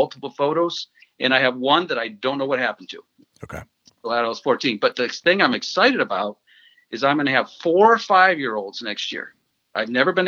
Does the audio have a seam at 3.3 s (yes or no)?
no